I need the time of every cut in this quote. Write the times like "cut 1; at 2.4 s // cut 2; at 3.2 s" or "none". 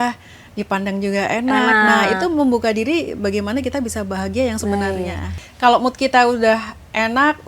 cut 1; at 5.4 s